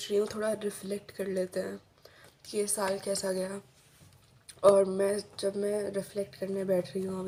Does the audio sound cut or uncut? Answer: uncut